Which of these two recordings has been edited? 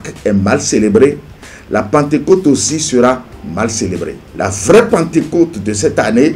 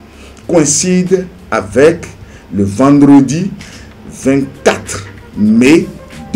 first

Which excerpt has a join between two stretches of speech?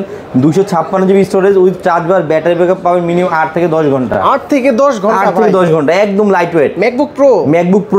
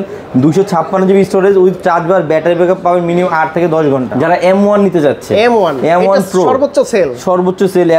second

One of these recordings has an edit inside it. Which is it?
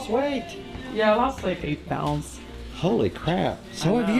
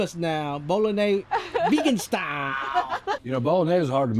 second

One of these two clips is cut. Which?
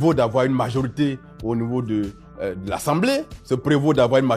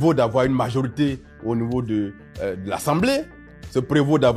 first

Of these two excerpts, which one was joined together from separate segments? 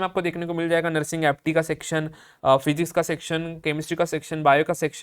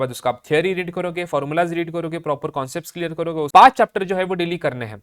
second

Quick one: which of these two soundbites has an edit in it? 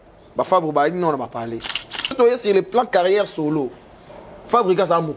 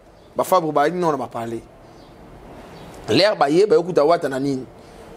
first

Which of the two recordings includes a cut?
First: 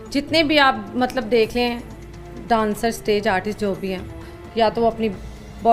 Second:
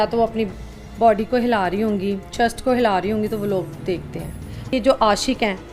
second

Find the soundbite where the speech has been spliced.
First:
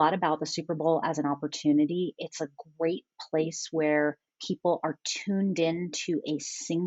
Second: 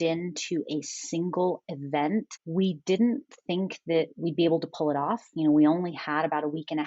second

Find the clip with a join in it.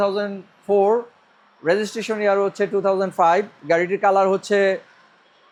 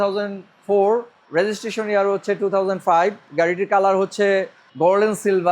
second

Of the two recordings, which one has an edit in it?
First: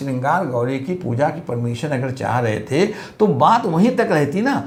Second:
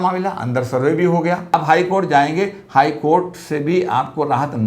second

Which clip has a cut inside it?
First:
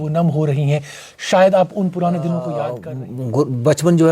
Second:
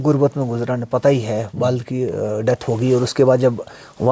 first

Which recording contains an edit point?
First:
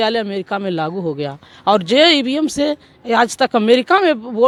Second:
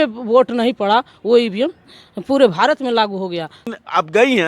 second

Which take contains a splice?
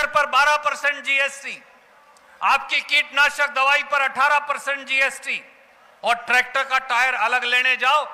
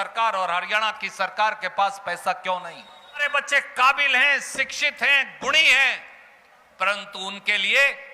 second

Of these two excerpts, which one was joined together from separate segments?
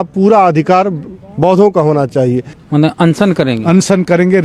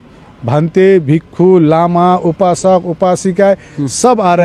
first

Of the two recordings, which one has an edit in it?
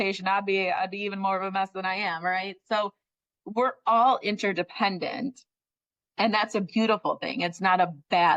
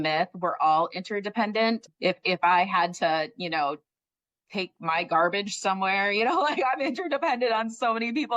second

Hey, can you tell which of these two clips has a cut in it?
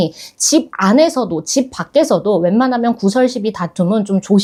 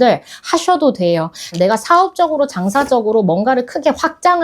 second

